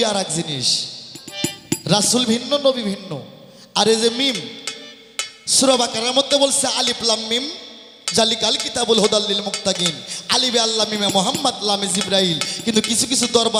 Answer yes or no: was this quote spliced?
no